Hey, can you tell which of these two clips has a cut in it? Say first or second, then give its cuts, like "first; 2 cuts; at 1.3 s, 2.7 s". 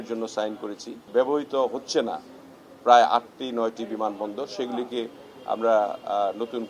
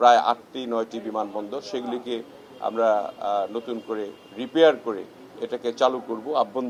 first; 1 cut; at 0.9 s